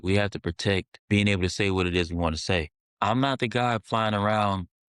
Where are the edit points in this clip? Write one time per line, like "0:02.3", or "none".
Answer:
0:00.9
0:02.8

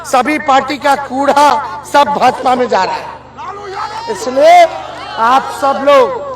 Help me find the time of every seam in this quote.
none

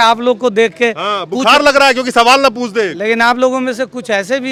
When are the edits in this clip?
none

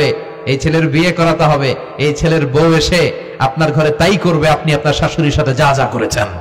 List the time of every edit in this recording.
none

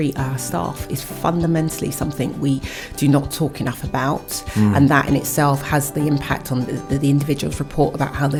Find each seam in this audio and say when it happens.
none

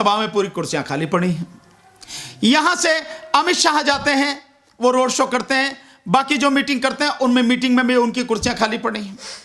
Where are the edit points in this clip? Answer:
none

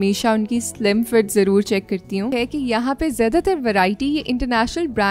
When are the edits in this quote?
0:02.3

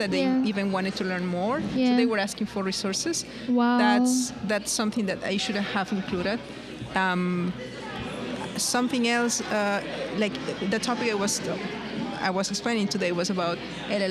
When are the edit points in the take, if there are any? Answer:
none

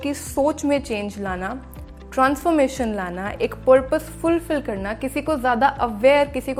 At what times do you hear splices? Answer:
none

